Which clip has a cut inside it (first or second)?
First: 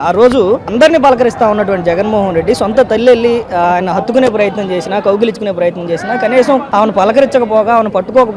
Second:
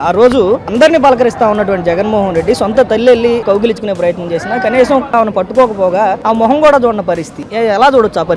second